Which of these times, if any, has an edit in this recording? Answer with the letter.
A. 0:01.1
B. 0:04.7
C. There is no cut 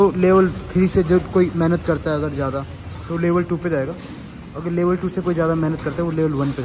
C